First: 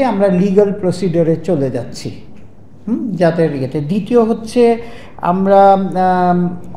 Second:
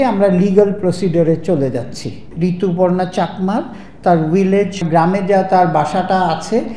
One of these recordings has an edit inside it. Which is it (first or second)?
second